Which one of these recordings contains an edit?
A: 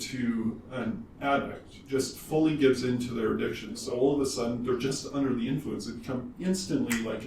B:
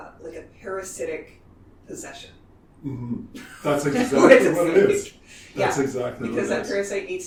A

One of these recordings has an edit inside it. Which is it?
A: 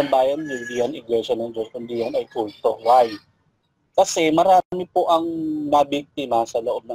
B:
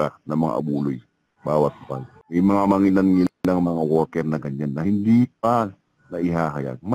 B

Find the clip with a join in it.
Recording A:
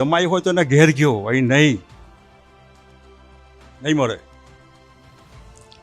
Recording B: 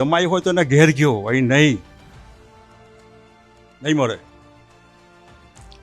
A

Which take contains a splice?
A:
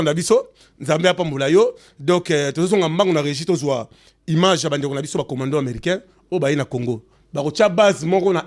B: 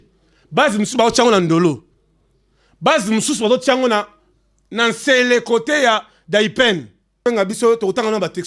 B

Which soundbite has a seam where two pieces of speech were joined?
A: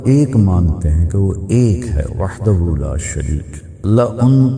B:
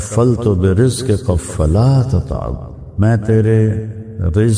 A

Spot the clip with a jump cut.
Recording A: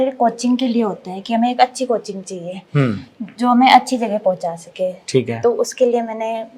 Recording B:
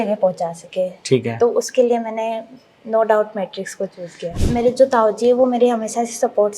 B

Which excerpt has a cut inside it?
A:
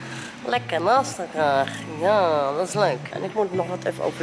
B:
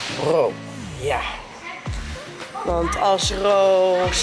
A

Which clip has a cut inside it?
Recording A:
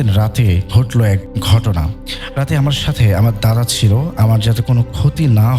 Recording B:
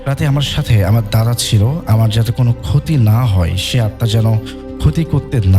A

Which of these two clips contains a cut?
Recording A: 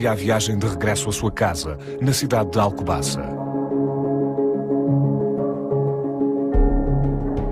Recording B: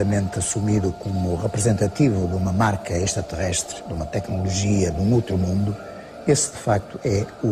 B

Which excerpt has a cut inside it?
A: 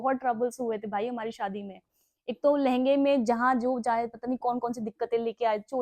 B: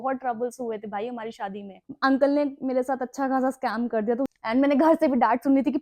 B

